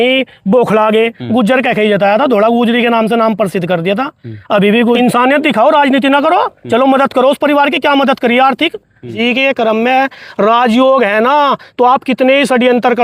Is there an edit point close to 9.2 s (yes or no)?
yes